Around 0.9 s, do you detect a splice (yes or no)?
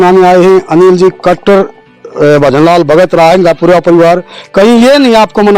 no